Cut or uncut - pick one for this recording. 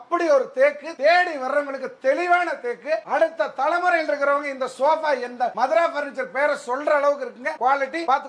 uncut